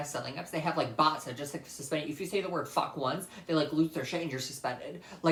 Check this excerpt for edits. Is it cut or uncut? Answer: uncut